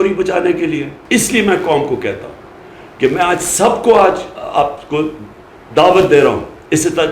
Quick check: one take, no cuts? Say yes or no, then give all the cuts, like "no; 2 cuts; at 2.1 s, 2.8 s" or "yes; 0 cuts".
no; 1 cut; at 0.9 s